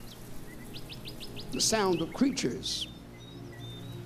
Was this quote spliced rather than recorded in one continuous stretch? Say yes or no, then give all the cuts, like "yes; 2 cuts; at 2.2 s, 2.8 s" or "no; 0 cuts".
no; 0 cuts